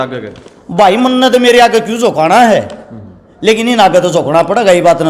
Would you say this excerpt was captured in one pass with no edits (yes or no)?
yes